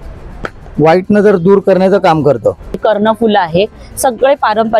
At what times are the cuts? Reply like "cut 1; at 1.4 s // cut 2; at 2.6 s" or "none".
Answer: cut 1; at 2.8 s